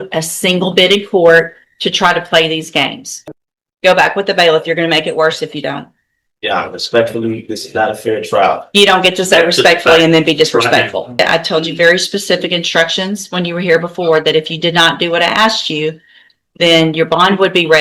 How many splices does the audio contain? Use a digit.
2